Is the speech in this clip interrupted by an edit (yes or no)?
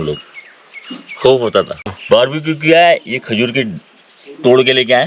yes